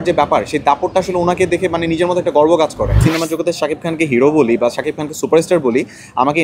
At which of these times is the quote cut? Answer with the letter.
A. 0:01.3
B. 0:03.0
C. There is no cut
B